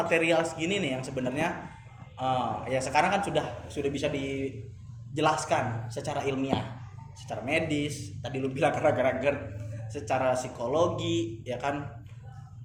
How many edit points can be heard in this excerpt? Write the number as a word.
zero